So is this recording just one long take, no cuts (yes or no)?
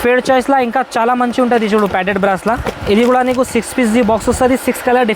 yes